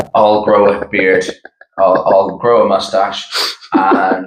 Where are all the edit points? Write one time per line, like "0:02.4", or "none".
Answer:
none

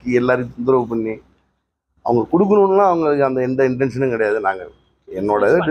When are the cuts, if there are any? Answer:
none

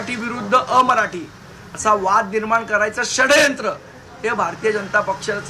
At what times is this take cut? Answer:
none

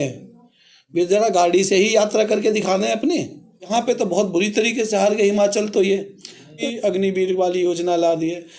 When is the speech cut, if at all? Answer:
0:03.7
0:06.6

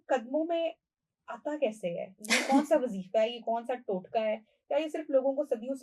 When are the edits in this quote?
none

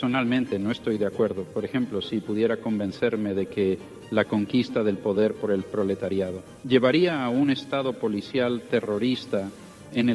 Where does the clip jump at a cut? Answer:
0:06.5

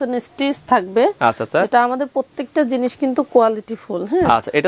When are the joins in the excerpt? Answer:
none

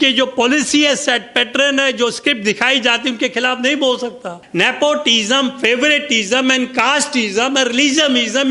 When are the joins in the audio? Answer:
0:04.4

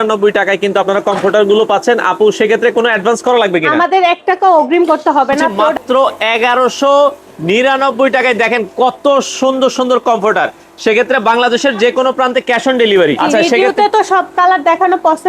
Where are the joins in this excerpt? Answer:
0:05.4
0:13.2

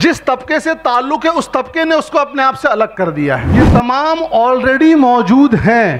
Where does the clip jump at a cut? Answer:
0:03.6

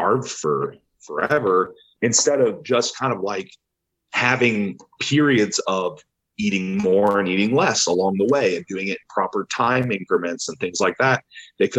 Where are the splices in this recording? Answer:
0:01.8

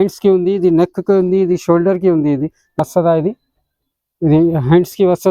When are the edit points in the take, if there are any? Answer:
0:02.8

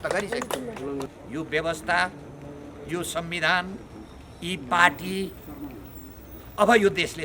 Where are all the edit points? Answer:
0:01.1

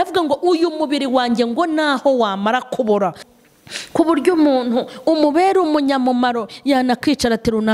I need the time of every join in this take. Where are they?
0:03.2

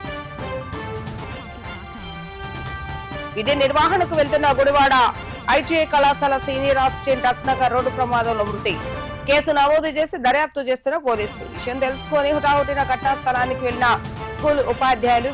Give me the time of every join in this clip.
0:00.9

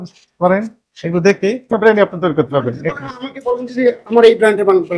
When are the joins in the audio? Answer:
0:01.7

